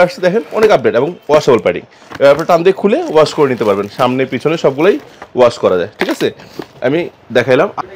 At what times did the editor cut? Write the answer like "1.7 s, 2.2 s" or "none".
none

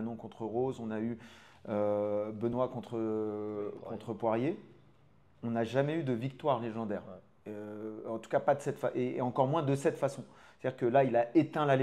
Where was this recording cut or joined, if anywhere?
none

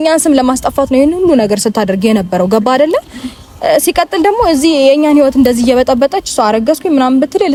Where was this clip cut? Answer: none

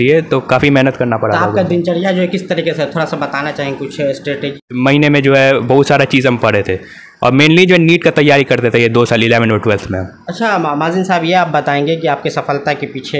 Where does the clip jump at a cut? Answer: 4.6 s

